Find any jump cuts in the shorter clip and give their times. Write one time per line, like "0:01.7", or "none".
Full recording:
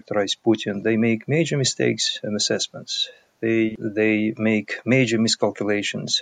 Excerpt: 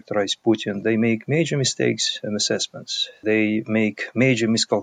0:03.2